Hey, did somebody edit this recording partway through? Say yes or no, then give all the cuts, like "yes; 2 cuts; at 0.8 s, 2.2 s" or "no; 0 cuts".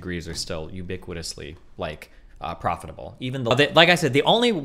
yes; 1 cut; at 3.5 s